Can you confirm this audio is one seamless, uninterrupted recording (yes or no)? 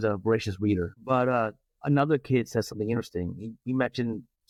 yes